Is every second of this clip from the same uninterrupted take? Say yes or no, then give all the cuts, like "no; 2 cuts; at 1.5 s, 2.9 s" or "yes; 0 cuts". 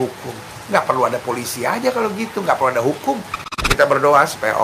no; 1 cut; at 3.6 s